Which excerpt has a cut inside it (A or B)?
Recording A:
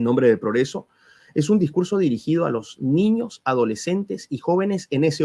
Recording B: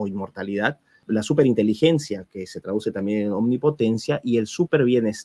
B